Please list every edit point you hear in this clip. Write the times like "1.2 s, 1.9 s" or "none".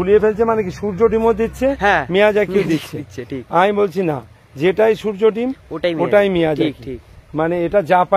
none